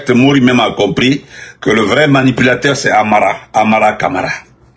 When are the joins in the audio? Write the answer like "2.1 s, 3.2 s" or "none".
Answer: none